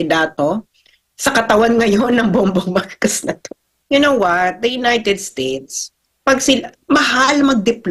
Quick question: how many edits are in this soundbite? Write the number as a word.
one